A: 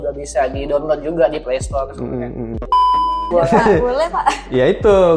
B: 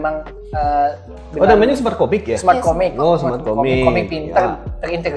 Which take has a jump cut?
A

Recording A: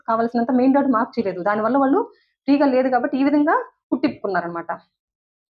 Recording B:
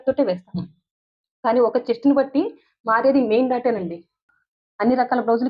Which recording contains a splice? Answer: B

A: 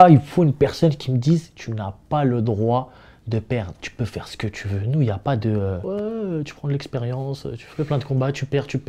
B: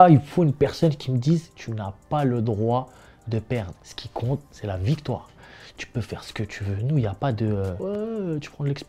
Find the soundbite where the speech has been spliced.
A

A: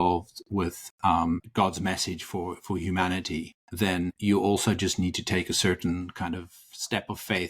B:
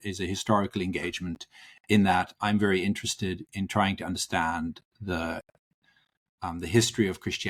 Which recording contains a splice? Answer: A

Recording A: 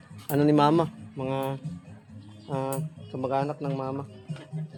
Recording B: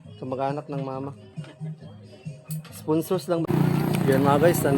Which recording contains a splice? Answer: B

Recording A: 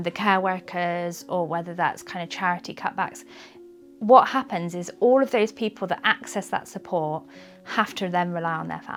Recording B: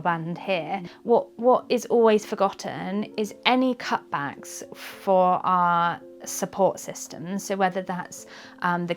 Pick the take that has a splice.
B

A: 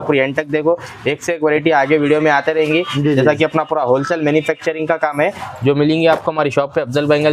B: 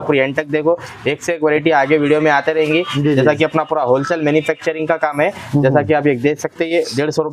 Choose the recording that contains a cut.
A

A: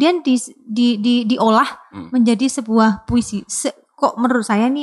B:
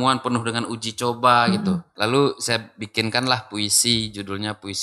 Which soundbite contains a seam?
B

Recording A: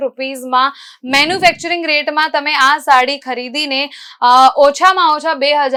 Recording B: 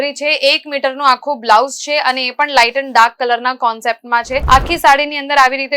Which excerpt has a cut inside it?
B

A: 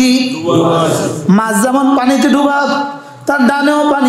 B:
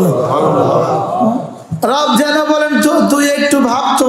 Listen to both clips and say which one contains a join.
B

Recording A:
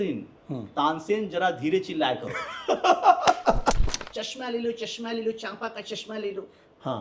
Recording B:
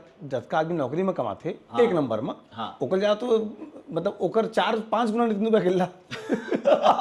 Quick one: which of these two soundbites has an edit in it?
A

